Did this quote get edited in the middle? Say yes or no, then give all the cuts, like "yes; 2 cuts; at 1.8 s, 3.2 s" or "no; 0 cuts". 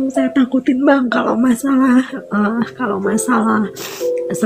no; 0 cuts